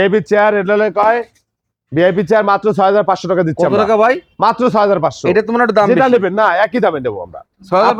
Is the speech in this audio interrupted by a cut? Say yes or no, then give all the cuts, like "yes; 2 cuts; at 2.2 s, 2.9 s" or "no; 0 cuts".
no; 0 cuts